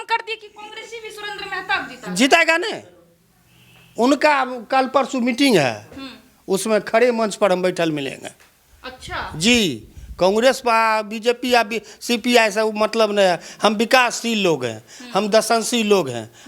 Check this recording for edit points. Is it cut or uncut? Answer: uncut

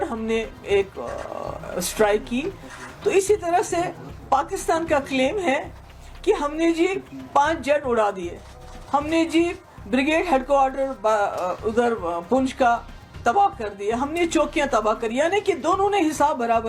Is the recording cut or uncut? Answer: uncut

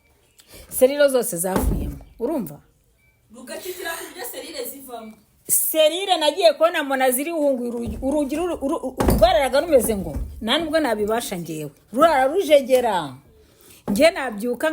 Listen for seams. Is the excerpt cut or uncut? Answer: uncut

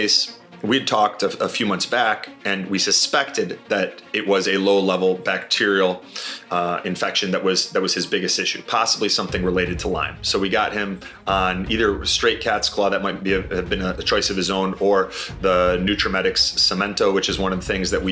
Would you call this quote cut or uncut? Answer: uncut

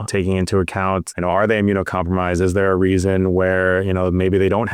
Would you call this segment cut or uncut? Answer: cut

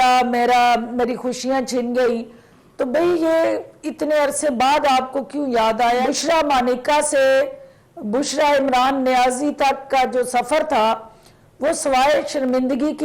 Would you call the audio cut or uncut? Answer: cut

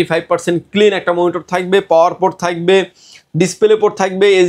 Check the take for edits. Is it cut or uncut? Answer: uncut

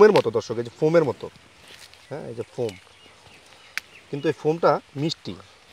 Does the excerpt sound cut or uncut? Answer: uncut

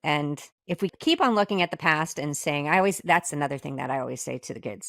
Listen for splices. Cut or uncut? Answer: cut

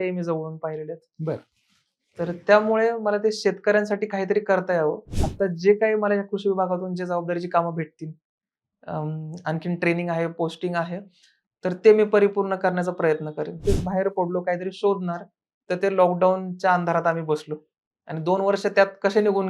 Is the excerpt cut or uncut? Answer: cut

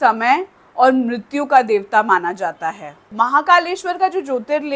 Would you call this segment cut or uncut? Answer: cut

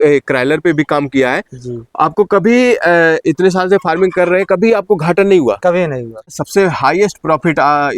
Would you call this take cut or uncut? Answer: cut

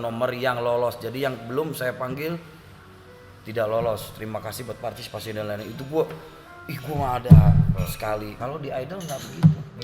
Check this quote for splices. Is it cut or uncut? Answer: cut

